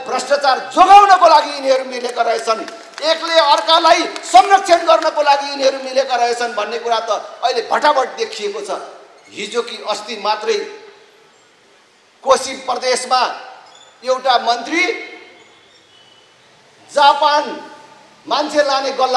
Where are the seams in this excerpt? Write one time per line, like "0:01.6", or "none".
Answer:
none